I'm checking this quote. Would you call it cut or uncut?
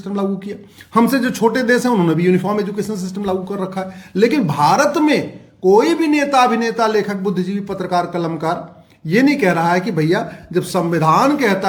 uncut